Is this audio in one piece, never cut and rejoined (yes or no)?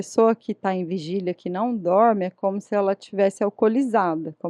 yes